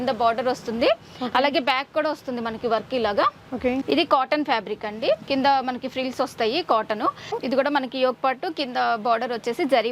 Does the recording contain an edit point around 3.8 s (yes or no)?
yes